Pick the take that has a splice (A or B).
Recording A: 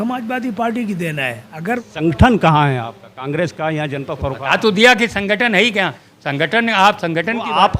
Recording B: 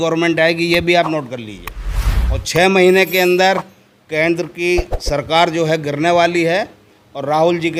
A